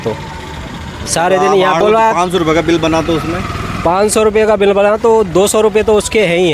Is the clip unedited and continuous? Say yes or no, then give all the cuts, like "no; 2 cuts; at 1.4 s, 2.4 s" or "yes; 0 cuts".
no; 1 cut; at 1.8 s